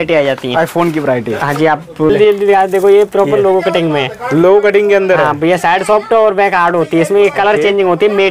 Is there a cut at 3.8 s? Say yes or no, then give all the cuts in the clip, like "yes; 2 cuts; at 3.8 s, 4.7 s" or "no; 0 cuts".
no; 1 cut; at 2.1 s